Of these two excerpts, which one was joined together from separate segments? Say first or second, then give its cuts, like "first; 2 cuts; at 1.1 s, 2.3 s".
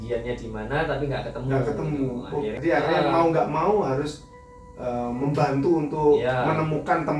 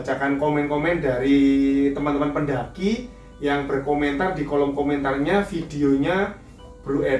first; 1 cut; at 2.5 s